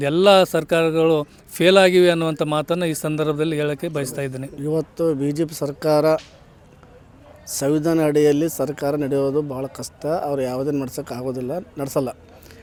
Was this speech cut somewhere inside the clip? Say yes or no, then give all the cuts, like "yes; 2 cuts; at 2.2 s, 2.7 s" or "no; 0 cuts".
no; 0 cuts